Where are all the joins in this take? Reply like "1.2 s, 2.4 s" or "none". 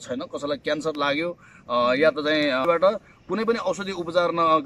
2.6 s